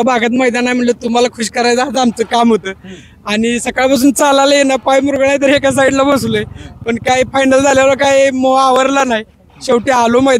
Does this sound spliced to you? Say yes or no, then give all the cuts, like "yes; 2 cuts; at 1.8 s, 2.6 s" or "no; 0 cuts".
no; 0 cuts